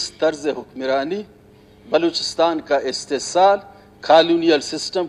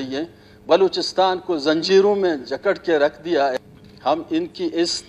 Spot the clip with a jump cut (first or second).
second